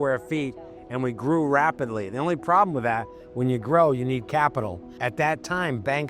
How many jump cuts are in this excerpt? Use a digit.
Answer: 1